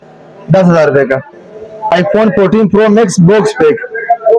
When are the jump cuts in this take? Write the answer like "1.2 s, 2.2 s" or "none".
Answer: 1.9 s